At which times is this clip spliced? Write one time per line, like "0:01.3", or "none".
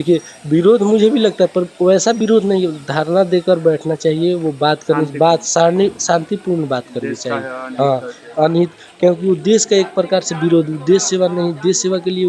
none